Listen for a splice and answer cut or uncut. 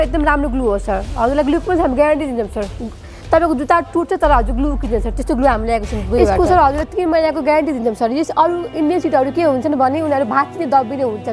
cut